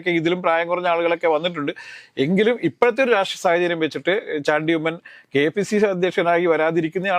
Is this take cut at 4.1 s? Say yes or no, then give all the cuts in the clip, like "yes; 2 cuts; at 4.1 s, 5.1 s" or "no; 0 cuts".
no; 0 cuts